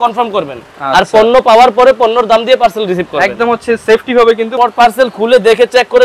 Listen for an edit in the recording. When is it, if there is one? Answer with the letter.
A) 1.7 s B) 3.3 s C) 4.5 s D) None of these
C